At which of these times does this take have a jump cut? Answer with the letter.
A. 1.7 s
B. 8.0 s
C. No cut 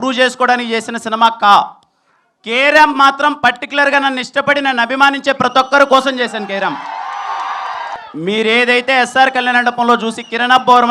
B